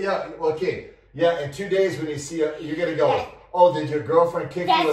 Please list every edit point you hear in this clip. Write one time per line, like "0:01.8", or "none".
none